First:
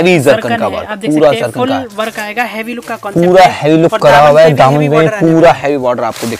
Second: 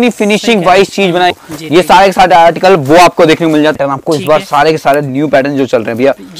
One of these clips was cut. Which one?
second; 2 cuts; at 1.3 s, 3.8 s

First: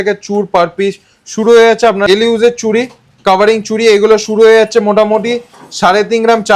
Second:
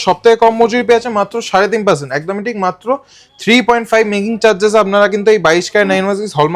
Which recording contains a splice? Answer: first; 1 cut; at 2.1 s

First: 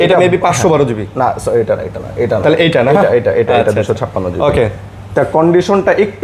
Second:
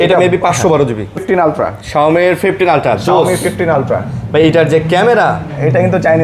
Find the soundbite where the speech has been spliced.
second; 1 cut; at 1.2 s

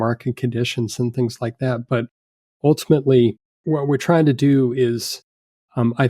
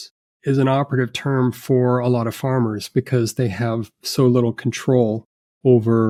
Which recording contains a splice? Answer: first; 1 cut; at 3.6 s

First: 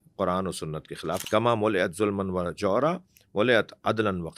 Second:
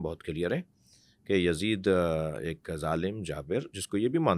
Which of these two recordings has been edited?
first; 1 cut; at 1.2 s

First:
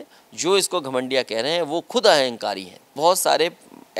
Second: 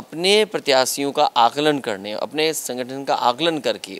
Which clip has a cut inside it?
first; 1 cut; at 3.0 s

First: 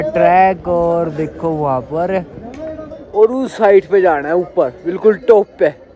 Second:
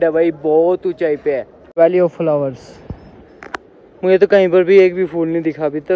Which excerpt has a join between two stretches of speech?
second; 1 cut; at 1.6 s

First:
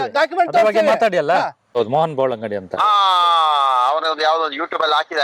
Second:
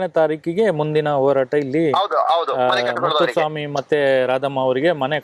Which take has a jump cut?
first; 1 cut; at 1.7 s

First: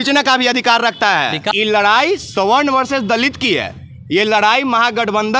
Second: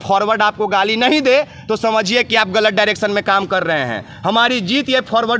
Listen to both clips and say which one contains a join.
first; 1 cut; at 1.5 s

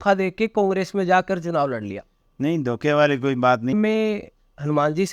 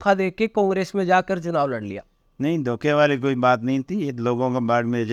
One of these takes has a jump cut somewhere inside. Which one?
first; 1 cut; at 3.7 s

